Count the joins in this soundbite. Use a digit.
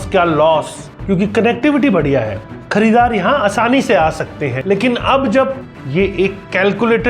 2